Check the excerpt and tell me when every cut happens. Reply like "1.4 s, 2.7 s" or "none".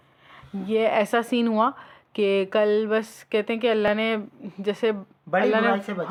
none